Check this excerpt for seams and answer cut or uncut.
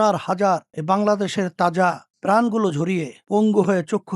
cut